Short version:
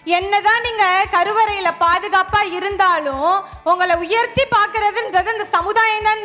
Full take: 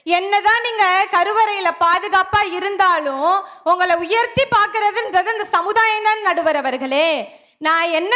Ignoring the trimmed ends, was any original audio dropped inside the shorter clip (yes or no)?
no